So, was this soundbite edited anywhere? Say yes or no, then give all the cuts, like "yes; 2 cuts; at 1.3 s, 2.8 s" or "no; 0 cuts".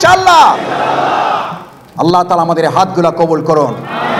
no; 0 cuts